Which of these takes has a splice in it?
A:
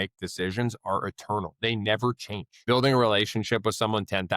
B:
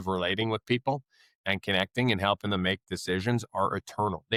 A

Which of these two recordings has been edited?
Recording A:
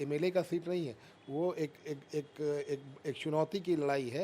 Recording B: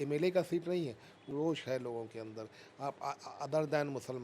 B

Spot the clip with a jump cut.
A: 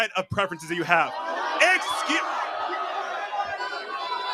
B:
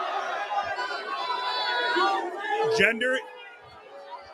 B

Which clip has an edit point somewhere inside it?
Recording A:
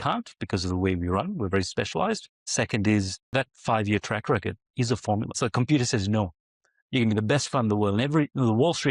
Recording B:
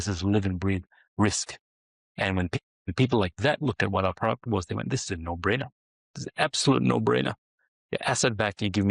A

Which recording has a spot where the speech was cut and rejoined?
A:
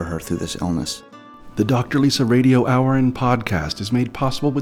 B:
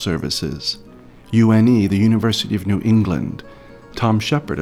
A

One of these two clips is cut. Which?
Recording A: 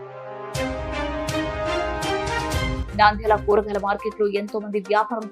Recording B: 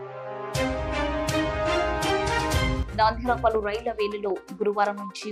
A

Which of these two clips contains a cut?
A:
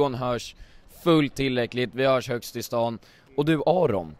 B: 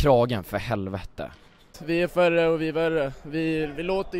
B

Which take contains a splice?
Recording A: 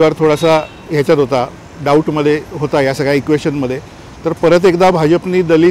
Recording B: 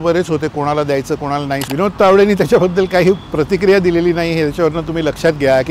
B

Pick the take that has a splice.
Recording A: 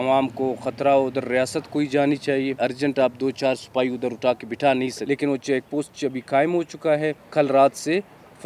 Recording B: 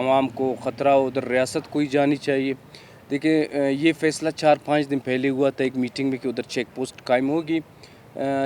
A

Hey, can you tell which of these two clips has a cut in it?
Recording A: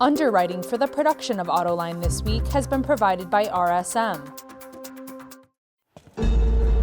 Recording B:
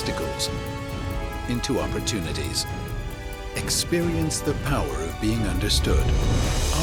A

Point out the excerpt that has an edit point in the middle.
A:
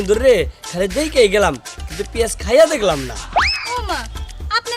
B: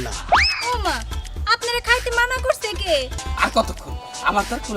B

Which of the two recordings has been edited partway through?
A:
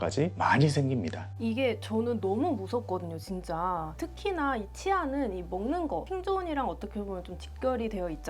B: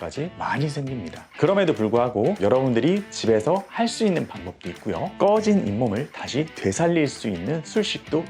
B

